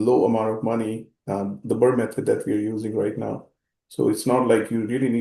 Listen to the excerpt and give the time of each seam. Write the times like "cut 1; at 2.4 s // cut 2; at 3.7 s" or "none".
none